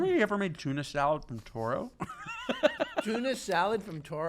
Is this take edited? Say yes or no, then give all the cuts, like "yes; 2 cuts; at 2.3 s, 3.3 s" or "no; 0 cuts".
yes; 1 cut; at 3.0 s